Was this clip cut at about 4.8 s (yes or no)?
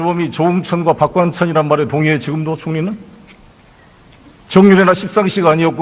no